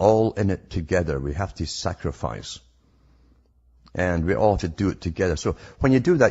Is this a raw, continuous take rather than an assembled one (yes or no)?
no